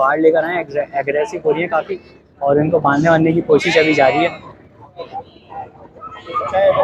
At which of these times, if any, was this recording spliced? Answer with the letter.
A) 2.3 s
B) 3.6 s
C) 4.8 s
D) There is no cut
D